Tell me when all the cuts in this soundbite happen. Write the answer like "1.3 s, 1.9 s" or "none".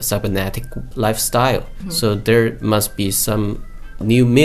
1.8 s